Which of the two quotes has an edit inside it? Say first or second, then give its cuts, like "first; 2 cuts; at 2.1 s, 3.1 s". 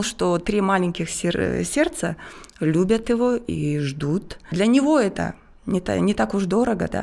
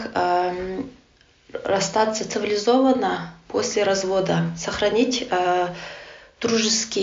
first; 1 cut; at 4.5 s